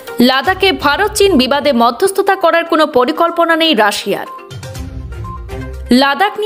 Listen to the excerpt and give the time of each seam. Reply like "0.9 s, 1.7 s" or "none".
none